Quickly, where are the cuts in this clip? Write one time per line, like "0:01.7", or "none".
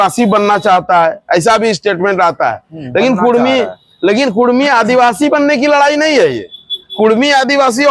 none